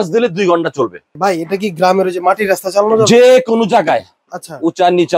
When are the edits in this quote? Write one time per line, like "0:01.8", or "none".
0:01.0